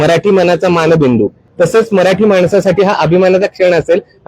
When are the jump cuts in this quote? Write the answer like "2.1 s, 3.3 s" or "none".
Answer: 1.4 s